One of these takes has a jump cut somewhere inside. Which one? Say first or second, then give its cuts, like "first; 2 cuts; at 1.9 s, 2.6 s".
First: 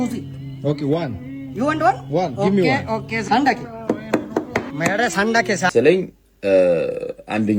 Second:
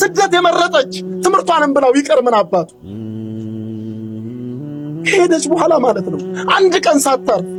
first; 1 cut; at 5.7 s